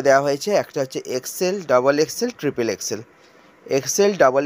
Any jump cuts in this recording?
no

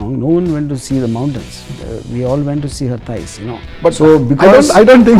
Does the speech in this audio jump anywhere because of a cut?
no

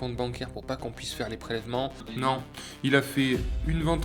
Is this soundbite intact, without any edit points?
no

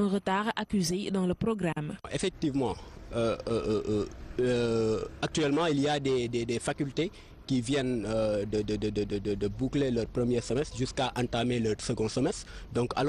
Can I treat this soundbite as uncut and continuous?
no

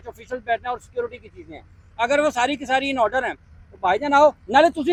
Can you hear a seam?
no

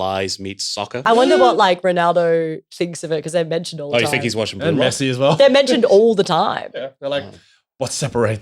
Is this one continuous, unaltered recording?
no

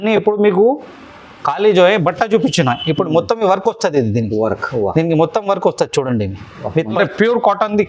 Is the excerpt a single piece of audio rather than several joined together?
no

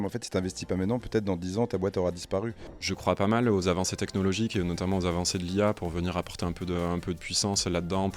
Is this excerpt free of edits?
no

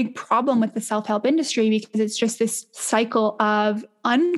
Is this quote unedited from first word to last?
no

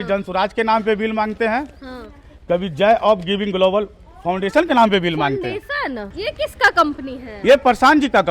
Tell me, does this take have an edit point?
yes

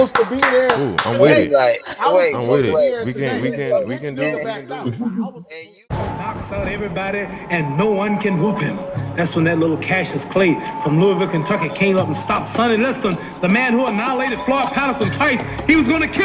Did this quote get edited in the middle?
no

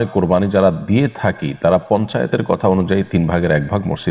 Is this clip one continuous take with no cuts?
yes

